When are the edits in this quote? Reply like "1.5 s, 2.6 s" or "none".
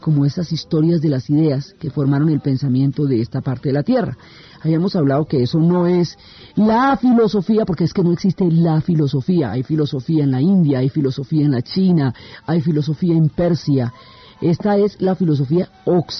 12.8 s